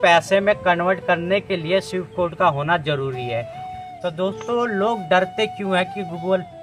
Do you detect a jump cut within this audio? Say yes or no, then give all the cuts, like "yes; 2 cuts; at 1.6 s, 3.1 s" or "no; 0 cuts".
yes; 1 cut; at 3.6 s